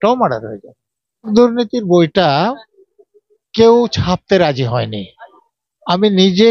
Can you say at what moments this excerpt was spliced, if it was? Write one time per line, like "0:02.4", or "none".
0:01.3